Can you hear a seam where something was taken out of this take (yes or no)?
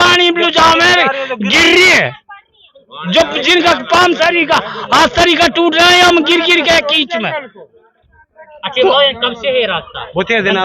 no